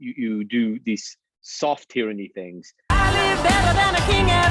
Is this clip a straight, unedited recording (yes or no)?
no